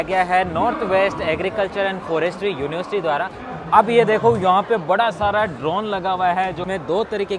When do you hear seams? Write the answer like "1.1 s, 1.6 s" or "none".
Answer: 3.4 s, 6.6 s